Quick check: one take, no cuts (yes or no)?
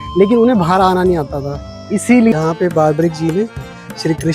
no